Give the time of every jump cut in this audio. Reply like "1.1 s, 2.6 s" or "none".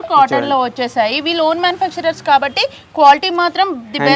none